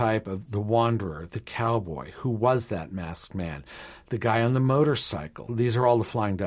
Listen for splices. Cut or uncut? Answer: cut